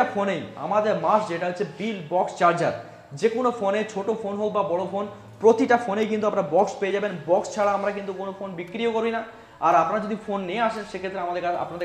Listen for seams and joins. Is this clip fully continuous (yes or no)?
yes